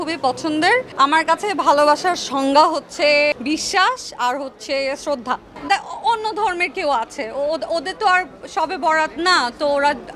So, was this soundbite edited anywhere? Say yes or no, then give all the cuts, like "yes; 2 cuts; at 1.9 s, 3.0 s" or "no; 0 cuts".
yes; 3 cuts; at 0.9 s, 3.3 s, 5.5 s